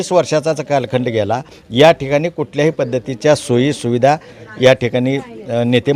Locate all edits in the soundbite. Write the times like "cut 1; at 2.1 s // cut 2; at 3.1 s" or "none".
none